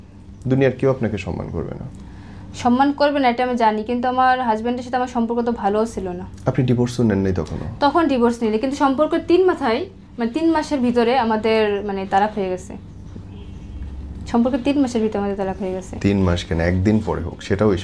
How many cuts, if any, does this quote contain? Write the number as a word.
zero